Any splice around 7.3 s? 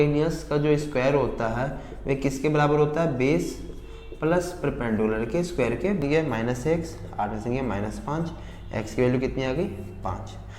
no; 1 cut; at 6.0 s

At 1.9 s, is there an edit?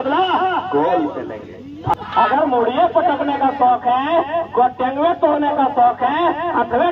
yes; 1 cut; at 1.9 s

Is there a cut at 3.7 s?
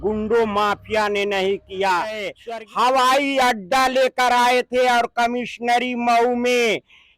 no; 1 cut; at 2.3 s

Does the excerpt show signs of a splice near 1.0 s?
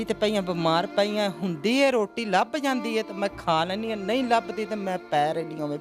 no; 0 cuts

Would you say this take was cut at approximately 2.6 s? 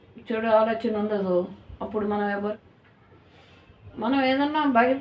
yes; 1 cut; at 2.6 s

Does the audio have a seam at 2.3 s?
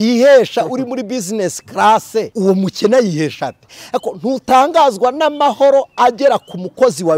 yes; 1 cut; at 2.3 s

